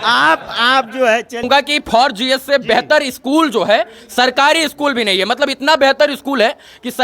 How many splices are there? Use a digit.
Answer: 1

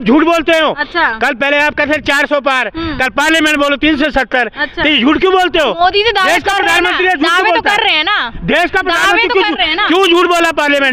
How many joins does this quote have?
0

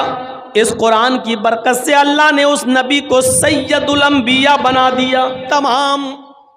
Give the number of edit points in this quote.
1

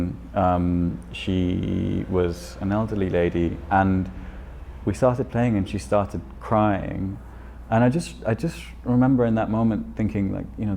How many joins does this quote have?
0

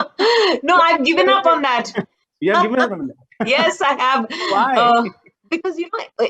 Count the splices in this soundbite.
1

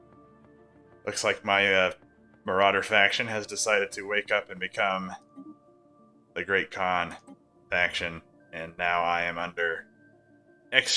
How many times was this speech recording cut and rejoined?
0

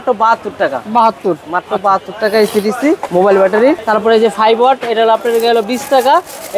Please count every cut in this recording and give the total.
0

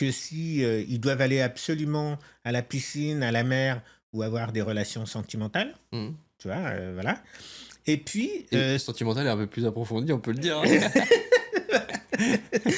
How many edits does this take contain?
0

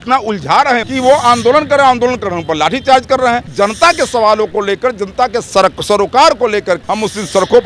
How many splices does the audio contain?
3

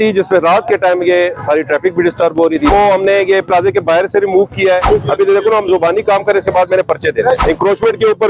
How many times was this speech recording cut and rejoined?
3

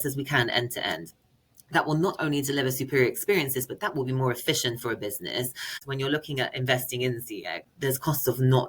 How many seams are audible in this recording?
2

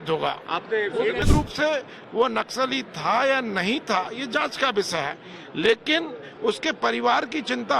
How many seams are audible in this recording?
1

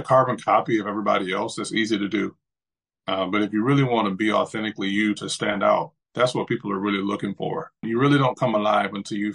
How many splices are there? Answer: 1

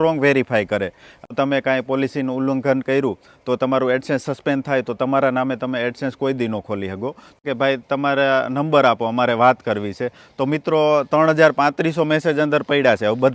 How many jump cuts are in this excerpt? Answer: 2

